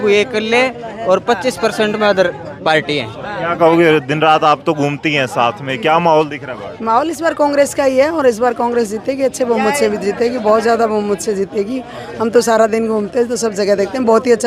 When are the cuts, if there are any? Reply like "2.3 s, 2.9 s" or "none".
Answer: none